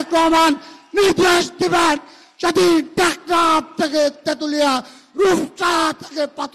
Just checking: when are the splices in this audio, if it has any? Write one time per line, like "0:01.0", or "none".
none